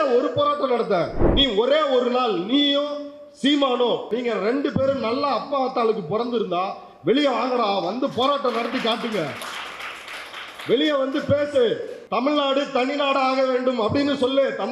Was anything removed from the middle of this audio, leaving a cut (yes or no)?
yes